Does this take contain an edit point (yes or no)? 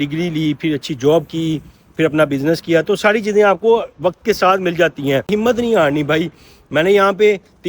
yes